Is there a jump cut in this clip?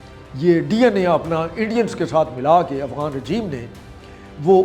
no; 0 cuts

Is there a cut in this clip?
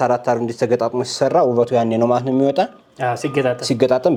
no; 0 cuts

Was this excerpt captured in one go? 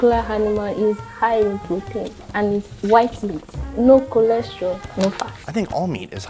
yes; 0 cuts

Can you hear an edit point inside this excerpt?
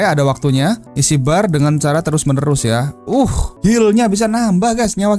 no; 0 cuts

